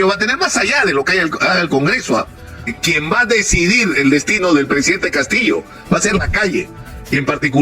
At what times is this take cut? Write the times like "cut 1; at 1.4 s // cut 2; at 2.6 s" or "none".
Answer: cut 1; at 2.8 s